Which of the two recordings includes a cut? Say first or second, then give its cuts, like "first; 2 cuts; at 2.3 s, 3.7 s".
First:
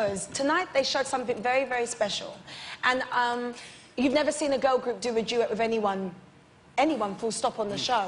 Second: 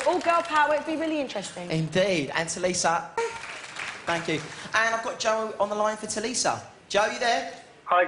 first; 1 cut; at 4.1 s